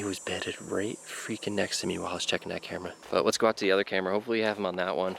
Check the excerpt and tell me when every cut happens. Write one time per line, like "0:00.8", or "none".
0:03.0